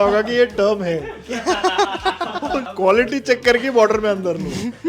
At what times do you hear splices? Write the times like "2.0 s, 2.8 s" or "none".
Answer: 2.7 s